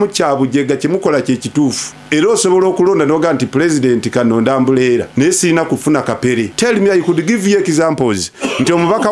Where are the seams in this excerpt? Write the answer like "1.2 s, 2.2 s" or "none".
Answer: 1.9 s, 5.1 s, 6.5 s